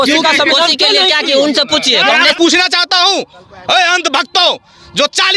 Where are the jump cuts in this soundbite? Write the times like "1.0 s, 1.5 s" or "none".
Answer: 2.3 s